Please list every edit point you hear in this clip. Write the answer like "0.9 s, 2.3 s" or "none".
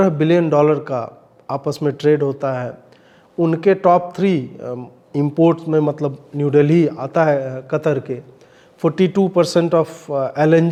none